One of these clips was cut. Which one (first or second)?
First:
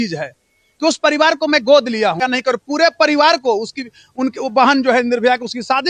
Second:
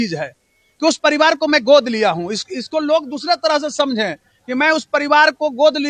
first